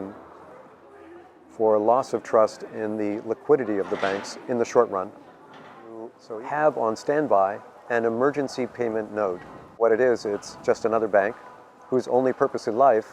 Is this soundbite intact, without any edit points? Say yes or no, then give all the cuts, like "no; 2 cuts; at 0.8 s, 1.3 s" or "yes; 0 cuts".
no; 2 cuts; at 6.3 s, 9.8 s